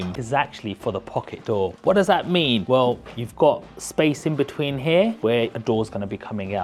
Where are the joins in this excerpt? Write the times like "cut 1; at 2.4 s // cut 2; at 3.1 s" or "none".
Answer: none